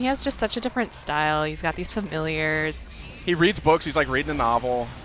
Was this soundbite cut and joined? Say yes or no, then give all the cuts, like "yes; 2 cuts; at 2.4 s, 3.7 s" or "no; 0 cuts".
yes; 1 cut; at 3.3 s